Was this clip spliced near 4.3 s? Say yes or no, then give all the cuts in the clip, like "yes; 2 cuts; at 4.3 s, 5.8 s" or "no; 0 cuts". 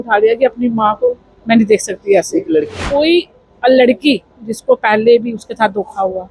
no; 1 cut; at 2.7 s